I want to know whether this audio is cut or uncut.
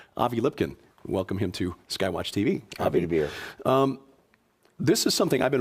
cut